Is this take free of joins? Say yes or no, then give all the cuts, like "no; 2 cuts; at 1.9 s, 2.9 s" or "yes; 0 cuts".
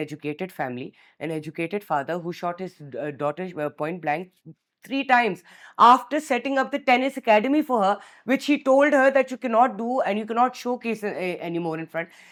yes; 0 cuts